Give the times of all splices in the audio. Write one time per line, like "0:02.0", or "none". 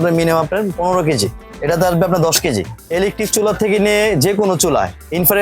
0:01.5
0:02.8